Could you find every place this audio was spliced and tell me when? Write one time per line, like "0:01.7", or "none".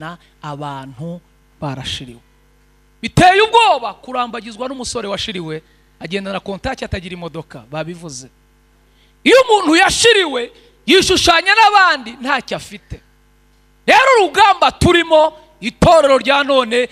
none

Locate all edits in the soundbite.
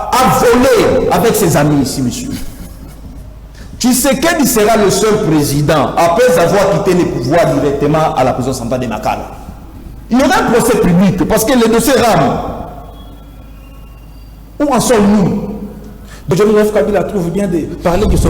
0:16.1

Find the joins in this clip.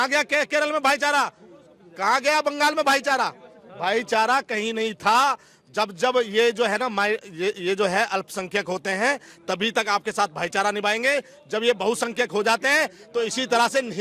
none

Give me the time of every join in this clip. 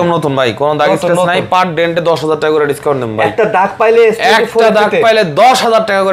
none

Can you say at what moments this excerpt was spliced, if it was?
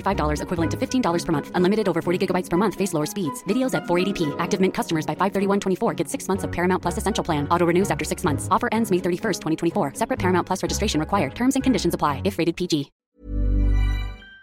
0:13.0

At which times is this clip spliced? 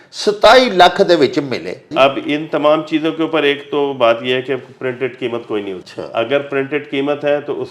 0:01.9
0:05.9

